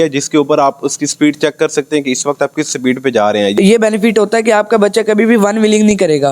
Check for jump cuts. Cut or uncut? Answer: cut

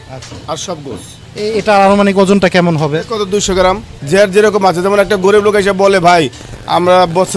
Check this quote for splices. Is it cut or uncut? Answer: cut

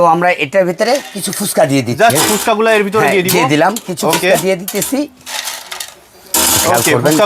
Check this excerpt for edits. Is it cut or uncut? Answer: uncut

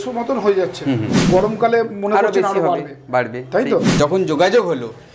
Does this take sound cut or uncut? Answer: cut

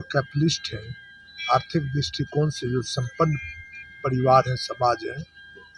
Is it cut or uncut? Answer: uncut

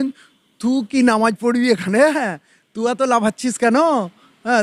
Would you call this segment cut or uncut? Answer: uncut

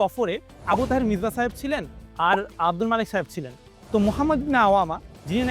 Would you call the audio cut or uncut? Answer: uncut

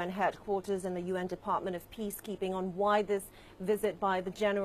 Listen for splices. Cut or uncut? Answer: uncut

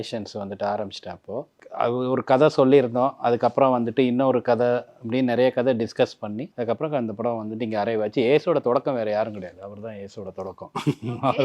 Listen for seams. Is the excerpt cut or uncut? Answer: cut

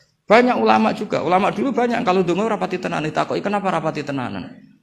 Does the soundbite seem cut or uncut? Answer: uncut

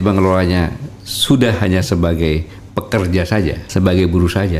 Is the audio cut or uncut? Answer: cut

